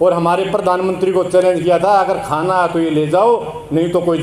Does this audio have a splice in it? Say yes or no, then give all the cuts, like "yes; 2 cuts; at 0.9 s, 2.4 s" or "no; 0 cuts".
no; 0 cuts